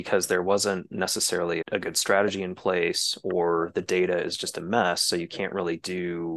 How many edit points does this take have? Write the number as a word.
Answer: zero